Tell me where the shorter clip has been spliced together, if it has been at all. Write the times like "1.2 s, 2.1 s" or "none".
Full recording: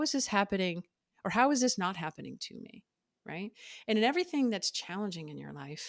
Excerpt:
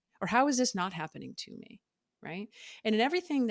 none